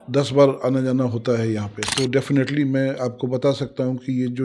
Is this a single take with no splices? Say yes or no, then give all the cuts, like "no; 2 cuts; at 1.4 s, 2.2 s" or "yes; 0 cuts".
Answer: no; 1 cut; at 1.7 s